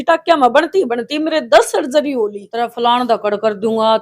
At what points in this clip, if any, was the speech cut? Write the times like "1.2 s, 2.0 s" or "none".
2.4 s